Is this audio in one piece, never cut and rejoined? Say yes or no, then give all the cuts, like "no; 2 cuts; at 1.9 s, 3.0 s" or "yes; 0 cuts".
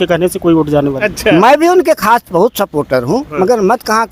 no; 1 cut; at 1.0 s